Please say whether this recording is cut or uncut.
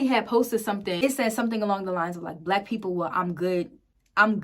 cut